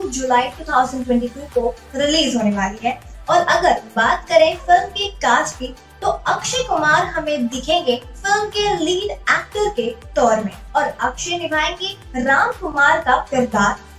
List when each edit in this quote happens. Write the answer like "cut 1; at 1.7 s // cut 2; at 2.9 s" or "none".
cut 1; at 10.6 s